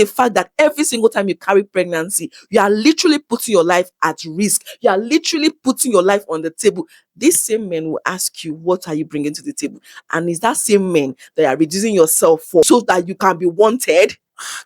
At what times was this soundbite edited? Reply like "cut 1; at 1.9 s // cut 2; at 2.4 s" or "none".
cut 1; at 12.7 s